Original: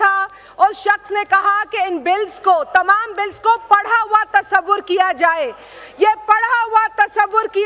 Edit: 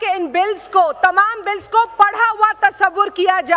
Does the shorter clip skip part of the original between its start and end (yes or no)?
no